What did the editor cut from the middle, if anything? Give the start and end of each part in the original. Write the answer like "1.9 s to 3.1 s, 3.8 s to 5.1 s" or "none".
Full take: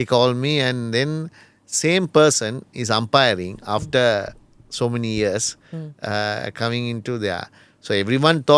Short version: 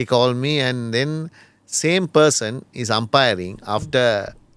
none